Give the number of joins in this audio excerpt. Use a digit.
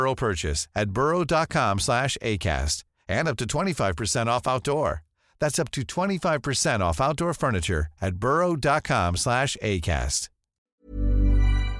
1